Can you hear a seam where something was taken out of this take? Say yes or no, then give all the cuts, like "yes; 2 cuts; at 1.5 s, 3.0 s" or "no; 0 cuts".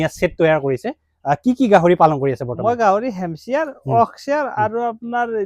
no; 0 cuts